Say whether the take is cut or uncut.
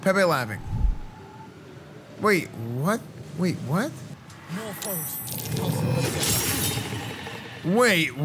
cut